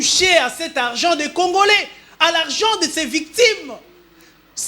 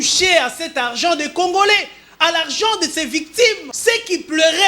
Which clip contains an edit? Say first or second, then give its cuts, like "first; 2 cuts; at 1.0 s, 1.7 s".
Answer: second; 1 cut; at 3.7 s